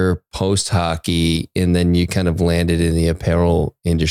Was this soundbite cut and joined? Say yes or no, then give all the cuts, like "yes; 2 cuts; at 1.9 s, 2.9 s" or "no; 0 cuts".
no; 0 cuts